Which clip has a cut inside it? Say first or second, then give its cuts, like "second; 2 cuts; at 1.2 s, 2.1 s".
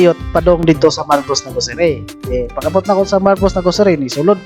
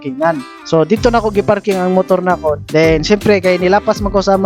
second; 1 cut; at 2.6 s